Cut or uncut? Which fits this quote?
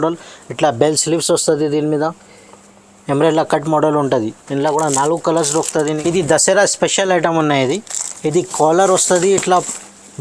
cut